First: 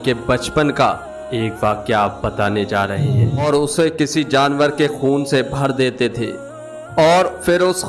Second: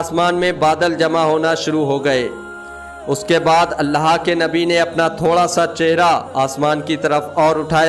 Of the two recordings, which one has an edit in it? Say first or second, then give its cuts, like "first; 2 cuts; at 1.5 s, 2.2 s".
first; 1 cut; at 3.4 s